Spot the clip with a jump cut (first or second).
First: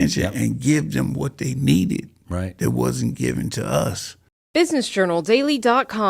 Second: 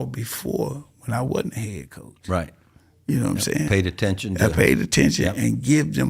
first